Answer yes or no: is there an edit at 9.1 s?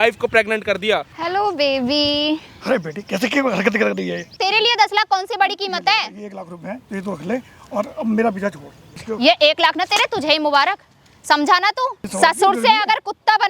yes